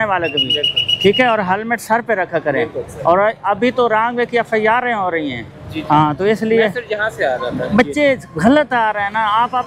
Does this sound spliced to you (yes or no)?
no